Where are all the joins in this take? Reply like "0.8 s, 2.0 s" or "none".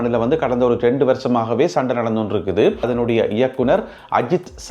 2.9 s